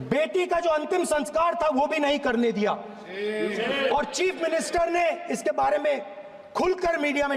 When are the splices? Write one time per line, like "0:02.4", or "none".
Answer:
none